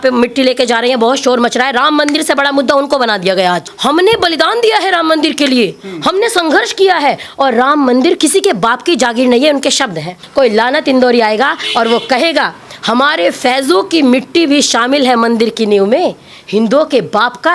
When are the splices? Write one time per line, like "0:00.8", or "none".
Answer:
0:03.7
0:08.2
0:10.2

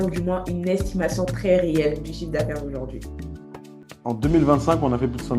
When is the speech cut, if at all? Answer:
0:03.8

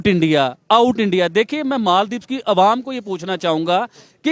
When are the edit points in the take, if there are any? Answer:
none

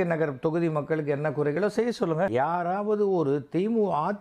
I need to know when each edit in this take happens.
0:02.3

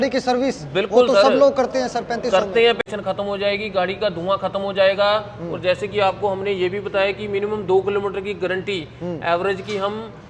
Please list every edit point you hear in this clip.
0:02.8

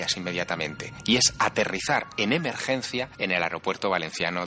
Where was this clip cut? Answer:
0:03.1

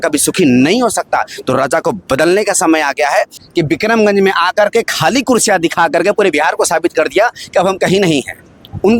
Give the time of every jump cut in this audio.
0:03.4

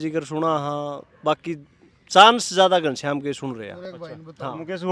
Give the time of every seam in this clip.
none

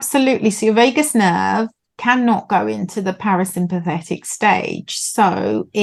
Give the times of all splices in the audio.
none

